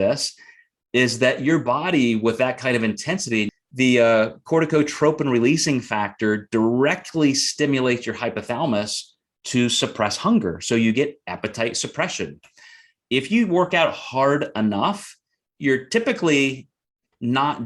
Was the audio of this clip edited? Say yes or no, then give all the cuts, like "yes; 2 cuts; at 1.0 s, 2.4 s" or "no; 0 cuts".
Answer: yes; 1 cut; at 3.5 s